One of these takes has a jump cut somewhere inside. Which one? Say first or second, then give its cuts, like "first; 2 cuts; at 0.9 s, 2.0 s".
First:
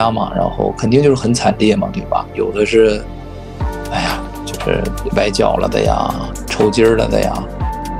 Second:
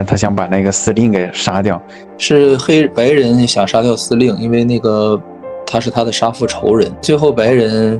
second; 2 cuts; at 2.1 s, 7.0 s